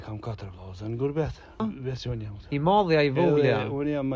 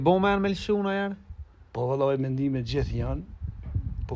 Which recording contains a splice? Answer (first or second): first